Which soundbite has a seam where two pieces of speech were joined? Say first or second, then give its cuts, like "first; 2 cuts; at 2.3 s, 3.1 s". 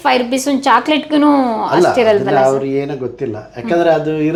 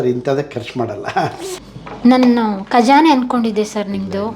second; 1 cut; at 1.6 s